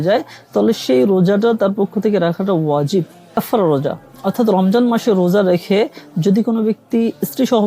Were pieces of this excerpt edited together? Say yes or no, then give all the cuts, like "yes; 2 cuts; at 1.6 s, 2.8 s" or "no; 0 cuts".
yes; 1 cut; at 3.4 s